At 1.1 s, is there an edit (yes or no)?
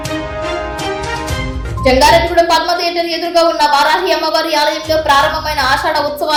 no